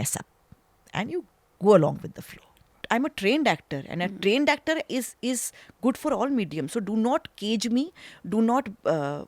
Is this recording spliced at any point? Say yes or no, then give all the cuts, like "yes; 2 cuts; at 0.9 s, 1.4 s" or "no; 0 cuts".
yes; 1 cut; at 2.8 s